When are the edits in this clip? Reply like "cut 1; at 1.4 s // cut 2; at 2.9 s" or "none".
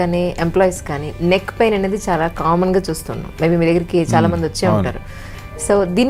none